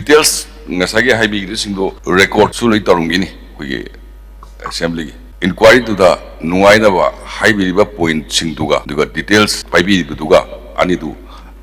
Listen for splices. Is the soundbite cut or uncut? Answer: uncut